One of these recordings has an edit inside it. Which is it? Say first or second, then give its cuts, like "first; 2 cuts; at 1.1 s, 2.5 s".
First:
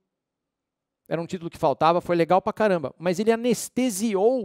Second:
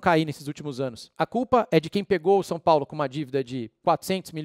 second; 1 cut; at 1.1 s